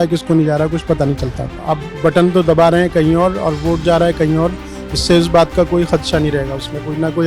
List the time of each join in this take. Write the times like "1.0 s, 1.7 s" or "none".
1.5 s